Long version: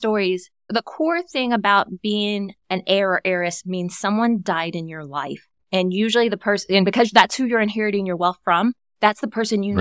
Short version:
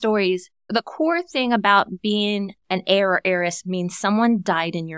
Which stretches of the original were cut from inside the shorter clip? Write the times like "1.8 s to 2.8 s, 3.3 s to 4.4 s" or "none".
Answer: none